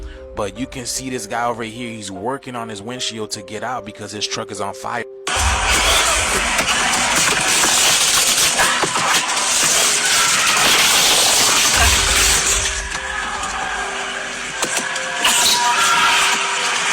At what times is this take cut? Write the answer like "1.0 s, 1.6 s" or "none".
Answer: none